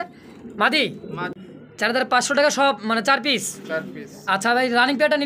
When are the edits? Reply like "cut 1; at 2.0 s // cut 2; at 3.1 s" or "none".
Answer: cut 1; at 1.3 s